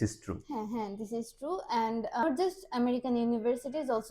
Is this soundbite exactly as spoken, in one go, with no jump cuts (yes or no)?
no